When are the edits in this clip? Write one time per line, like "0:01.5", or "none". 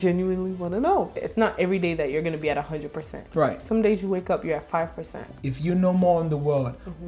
0:01.2
0:05.3

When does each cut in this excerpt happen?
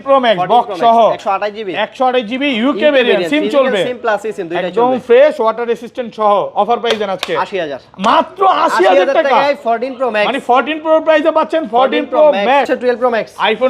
0:12.7

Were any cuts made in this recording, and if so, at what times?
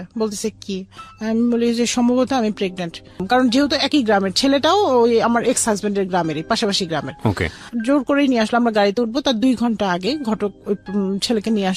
0:03.2

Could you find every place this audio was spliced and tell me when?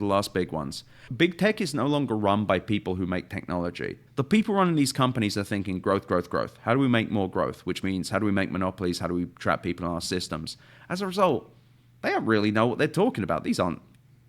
0:01.1
0:04.0

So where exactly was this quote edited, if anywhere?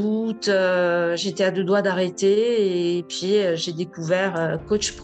none

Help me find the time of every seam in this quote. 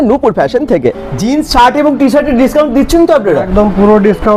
0:01.1

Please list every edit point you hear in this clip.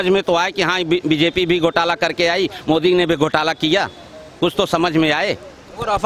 none

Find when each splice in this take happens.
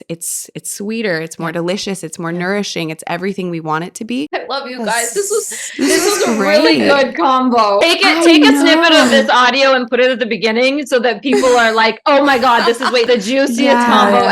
0:04.3
0:07.8
0:13.1

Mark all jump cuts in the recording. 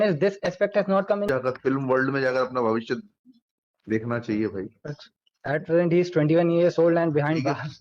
0:01.3

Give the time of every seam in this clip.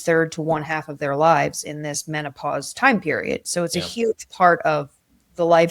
none

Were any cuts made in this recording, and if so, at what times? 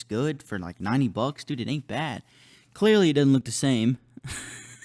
none

